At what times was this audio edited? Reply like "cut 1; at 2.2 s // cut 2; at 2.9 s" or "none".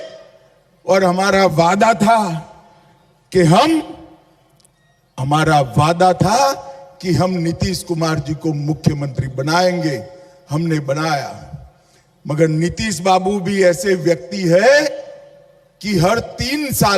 none